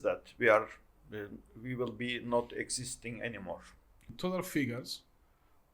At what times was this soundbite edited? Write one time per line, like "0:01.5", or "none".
0:04.1